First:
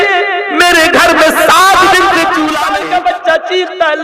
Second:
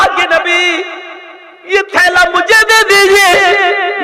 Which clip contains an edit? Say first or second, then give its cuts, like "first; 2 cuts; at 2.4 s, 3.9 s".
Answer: first; 1 cut; at 2.6 s